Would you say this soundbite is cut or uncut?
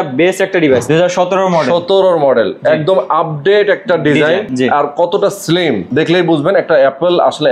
cut